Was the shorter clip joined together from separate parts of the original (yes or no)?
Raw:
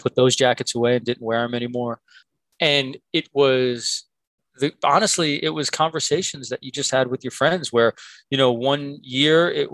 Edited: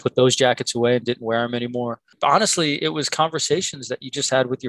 yes